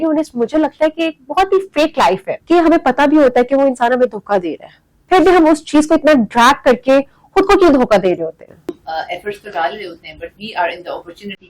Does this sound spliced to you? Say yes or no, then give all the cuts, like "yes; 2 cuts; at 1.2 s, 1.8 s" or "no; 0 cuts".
yes; 2 cuts; at 2.3 s, 8.8 s